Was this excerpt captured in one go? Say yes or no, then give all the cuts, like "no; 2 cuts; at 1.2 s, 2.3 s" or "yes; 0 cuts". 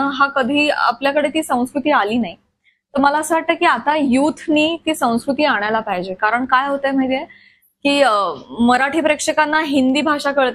yes; 0 cuts